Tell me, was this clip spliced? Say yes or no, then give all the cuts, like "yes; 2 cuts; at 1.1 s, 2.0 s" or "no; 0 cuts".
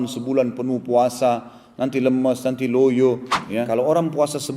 yes; 1 cut; at 3.7 s